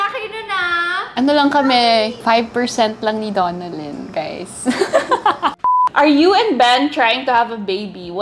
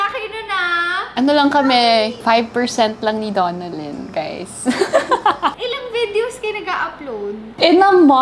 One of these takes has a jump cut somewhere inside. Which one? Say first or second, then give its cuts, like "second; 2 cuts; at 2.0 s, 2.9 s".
first; 1 cut; at 5.9 s